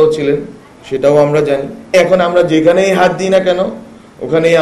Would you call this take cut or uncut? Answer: cut